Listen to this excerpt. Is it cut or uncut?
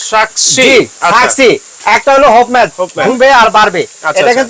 cut